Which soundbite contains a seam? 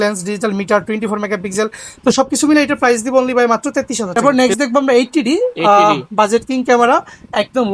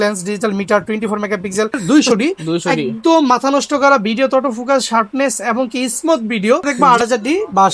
second; 2 cuts; at 1.8 s, 6.7 s

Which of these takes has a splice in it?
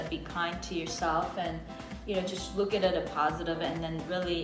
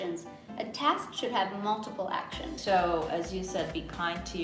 second; 1 cut; at 2.5 s

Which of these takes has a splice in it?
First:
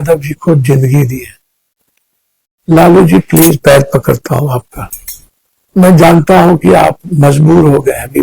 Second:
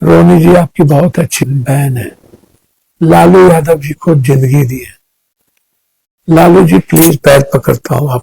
second; 1 cut; at 1.4 s

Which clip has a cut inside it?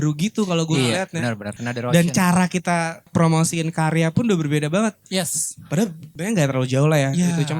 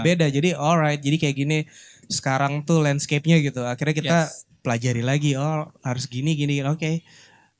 first; 3 cuts; at 1.5 s, 3.1 s, 6.1 s

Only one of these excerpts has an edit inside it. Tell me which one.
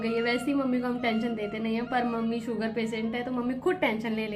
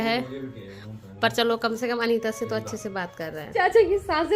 second; 1 cut; at 3.4 s

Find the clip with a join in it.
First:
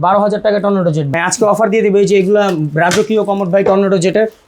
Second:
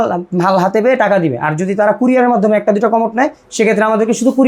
first; 1 cut; at 1.1 s

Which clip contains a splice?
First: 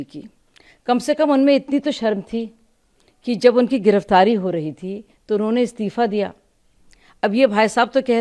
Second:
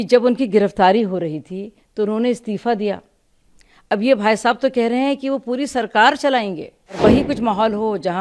second; 1 cut; at 7.0 s

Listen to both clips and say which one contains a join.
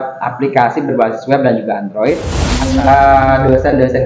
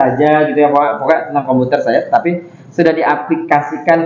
first; 1 cut; at 2.5 s

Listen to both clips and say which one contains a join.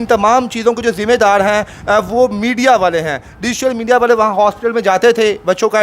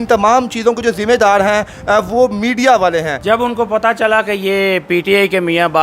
second; 1 cut; at 3.1 s

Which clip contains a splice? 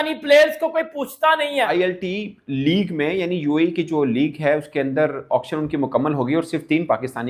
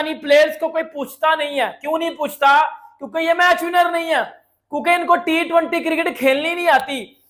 first; 1 cut; at 1.7 s

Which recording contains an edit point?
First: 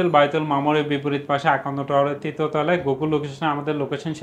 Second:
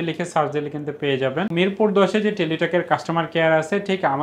second; 1 cut; at 1.5 s

